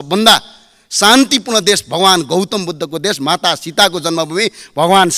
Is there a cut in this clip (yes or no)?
no